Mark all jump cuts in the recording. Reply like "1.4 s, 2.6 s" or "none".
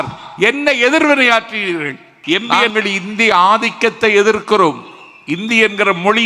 2.4 s